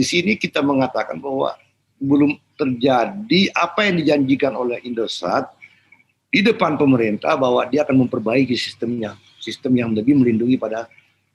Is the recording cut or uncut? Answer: uncut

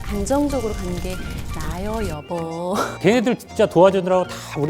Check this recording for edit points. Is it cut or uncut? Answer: cut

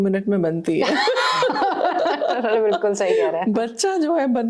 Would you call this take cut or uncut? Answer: uncut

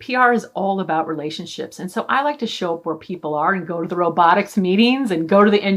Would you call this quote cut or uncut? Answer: uncut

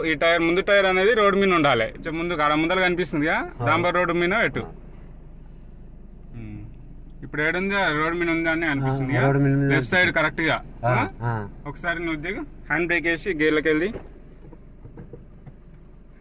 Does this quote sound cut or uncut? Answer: cut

